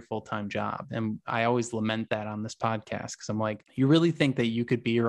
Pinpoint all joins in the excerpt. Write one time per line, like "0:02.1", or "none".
0:03.7

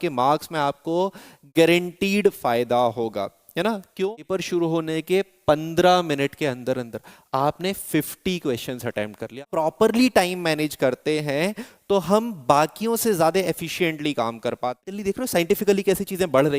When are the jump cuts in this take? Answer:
0:04.2
0:09.4
0:14.9

